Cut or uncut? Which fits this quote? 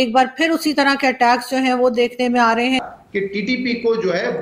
cut